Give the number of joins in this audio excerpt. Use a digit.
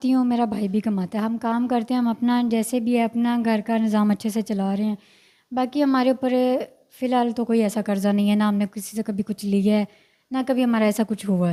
0